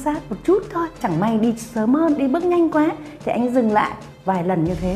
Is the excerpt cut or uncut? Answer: cut